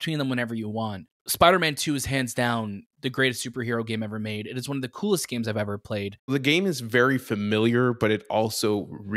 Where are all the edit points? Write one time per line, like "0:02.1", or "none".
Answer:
0:01.1
0:06.3